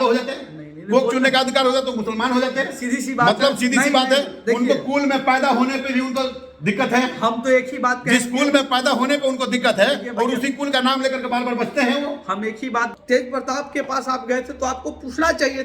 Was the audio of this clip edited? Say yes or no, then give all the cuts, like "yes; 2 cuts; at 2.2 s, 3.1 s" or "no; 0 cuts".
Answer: yes; 1 cut; at 12.9 s